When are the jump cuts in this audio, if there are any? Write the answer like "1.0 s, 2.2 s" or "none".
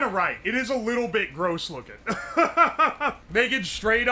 3.2 s